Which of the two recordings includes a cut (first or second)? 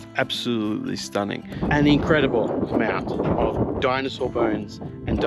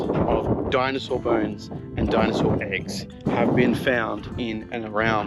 first